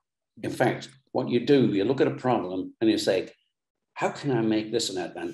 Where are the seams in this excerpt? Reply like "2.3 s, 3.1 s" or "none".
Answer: none